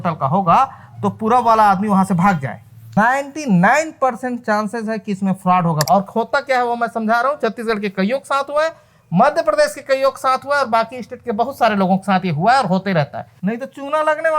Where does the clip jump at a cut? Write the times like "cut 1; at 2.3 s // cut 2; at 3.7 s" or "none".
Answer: cut 1; at 3.0 s // cut 2; at 5.8 s // cut 3; at 13.2 s